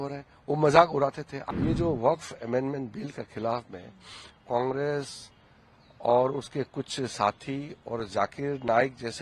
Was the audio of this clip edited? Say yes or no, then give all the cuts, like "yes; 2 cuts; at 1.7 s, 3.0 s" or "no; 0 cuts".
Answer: yes; 1 cut; at 1.3 s